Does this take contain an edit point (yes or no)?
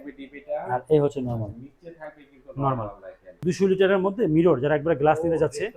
yes